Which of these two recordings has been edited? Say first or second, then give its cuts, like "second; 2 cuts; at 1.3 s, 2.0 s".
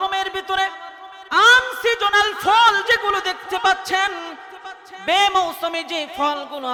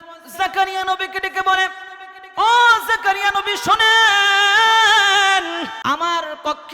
second; 1 cut; at 5.8 s